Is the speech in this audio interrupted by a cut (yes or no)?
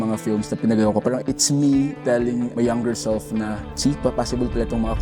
yes